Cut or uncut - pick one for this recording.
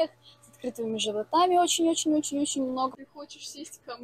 cut